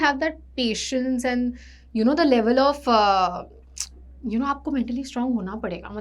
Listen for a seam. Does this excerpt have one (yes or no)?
no